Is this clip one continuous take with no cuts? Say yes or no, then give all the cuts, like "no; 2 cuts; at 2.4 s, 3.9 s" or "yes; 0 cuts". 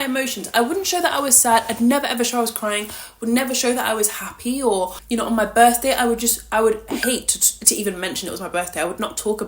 no; 1 cut; at 5.0 s